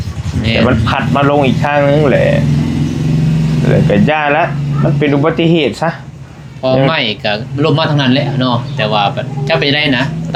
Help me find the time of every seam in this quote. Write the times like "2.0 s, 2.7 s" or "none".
none